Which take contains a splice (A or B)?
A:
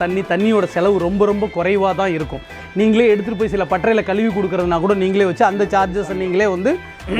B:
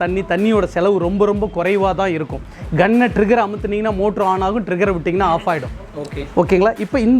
A